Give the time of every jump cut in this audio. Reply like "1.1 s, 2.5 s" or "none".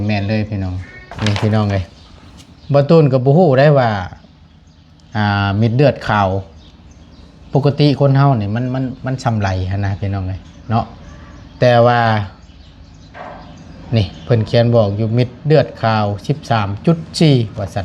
1.1 s